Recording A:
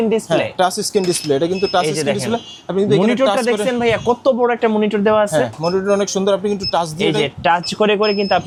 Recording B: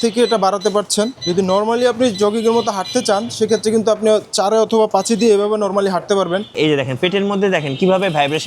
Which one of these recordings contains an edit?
B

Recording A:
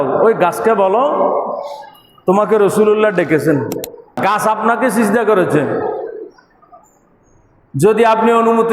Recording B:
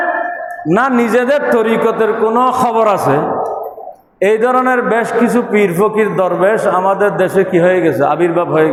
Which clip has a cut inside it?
A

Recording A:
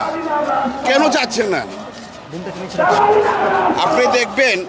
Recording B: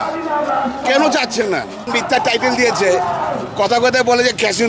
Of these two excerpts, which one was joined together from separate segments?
B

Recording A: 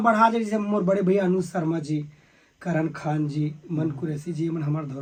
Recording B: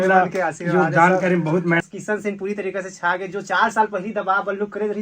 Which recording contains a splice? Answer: B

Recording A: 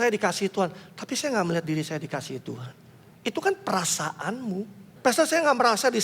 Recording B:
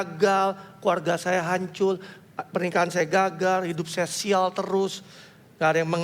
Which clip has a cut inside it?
A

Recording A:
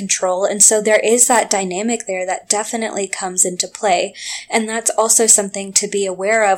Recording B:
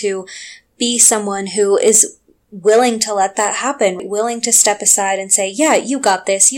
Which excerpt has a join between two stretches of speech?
B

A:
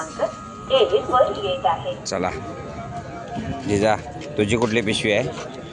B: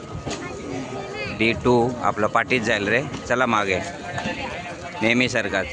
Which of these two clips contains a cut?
A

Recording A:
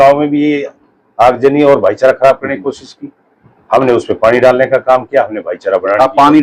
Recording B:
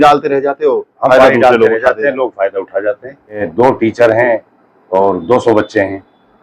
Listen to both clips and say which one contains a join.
B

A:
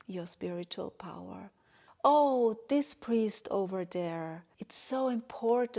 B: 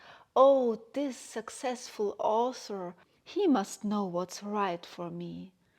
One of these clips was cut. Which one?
B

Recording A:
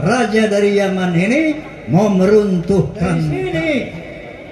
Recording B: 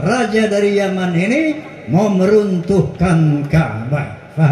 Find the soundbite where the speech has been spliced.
A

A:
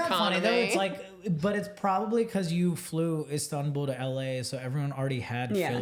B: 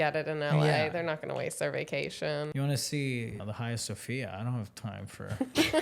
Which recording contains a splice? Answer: B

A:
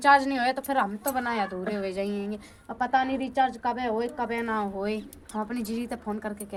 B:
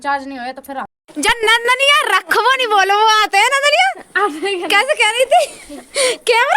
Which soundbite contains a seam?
B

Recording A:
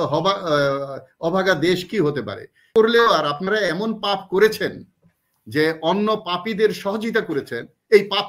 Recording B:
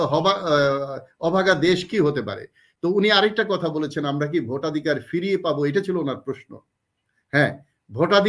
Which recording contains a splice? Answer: A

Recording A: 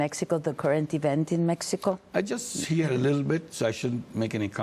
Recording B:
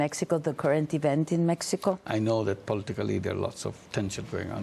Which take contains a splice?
B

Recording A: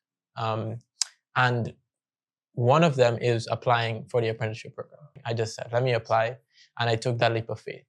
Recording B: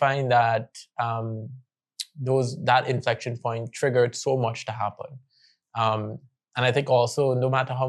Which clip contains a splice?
A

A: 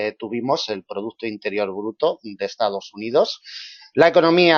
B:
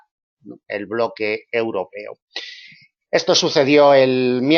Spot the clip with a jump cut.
B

